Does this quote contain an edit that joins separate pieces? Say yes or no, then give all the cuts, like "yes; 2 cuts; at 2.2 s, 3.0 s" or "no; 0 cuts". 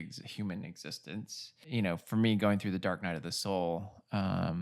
yes; 1 cut; at 1.6 s